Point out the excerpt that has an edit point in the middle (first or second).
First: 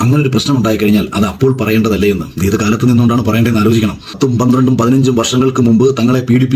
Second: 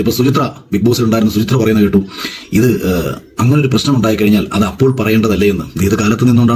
first